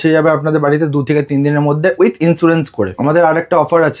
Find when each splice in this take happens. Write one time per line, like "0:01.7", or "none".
0:02.9